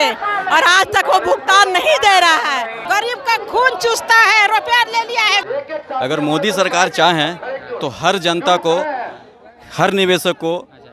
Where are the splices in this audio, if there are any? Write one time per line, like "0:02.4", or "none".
0:02.8
0:05.4